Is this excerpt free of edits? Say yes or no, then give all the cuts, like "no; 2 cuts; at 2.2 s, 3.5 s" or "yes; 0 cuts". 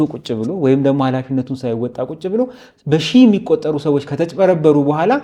yes; 0 cuts